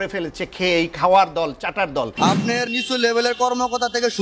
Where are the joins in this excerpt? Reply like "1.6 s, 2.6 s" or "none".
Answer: 2.1 s